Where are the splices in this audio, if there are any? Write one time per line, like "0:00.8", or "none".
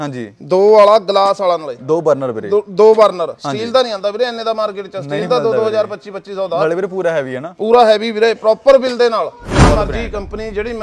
0:09.4